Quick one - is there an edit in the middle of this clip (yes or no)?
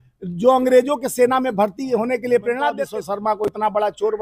yes